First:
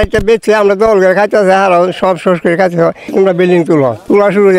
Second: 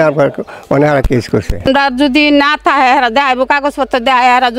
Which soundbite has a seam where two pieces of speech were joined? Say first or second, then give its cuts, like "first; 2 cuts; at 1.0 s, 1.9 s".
second; 1 cut; at 1.5 s